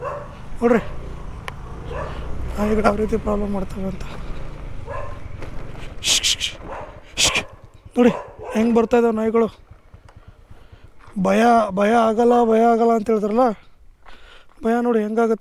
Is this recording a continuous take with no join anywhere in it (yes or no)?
yes